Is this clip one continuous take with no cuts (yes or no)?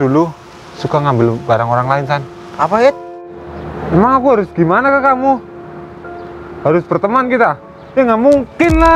no